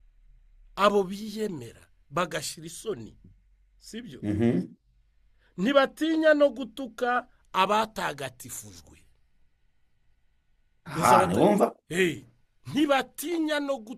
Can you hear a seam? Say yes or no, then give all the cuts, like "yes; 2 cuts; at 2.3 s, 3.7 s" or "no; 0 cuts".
no; 0 cuts